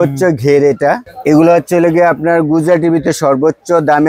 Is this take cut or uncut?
cut